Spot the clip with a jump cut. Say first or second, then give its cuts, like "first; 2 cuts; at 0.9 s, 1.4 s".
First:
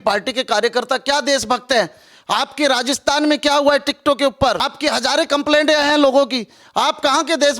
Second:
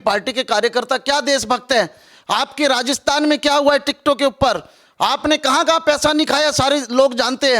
first; 1 cut; at 4.7 s